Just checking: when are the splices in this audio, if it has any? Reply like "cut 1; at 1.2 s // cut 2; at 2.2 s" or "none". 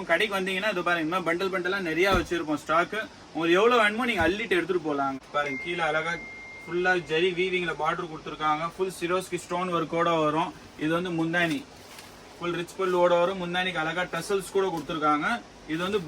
cut 1; at 5.2 s